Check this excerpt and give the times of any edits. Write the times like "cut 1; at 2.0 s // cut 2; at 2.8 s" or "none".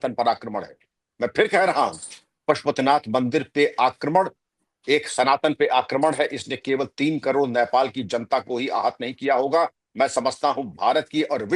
none